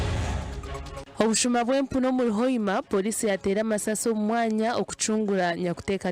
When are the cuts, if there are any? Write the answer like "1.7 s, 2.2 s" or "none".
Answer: 1.0 s